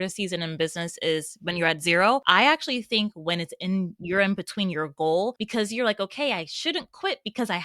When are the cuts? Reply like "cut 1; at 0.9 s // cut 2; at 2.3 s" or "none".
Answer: cut 1; at 2.2 s // cut 2; at 5.4 s